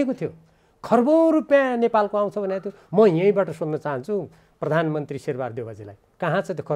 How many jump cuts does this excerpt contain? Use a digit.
0